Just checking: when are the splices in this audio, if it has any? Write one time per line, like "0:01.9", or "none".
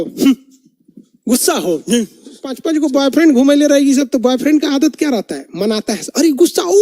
0:02.6